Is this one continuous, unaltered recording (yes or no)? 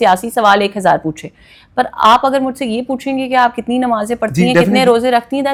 yes